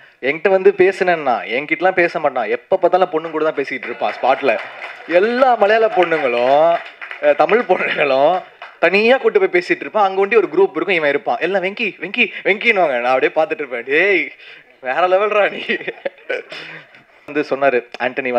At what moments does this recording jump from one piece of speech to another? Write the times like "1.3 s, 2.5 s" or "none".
17.3 s